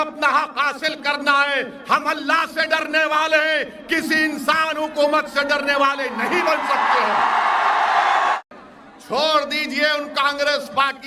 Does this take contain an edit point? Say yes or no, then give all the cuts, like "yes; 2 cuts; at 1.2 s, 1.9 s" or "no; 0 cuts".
no; 0 cuts